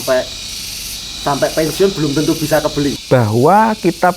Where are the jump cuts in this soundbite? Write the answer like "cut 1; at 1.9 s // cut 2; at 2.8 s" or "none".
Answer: cut 1; at 3.0 s